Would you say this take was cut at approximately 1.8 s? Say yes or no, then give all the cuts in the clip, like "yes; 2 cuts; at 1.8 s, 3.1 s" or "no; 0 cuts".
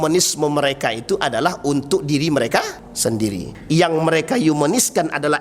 no; 1 cut; at 3.3 s